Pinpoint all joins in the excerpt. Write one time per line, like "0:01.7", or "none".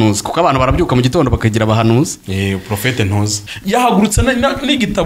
0:03.4